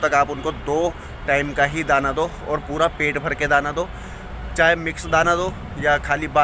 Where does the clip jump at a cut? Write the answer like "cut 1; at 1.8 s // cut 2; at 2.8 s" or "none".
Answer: none